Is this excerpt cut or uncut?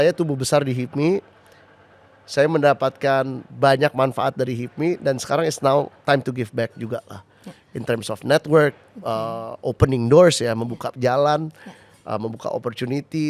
uncut